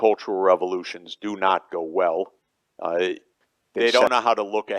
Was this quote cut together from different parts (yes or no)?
yes